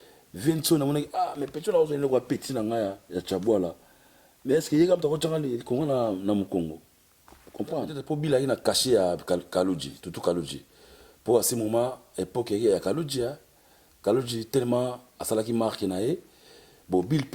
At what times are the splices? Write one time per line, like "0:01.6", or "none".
0:08.0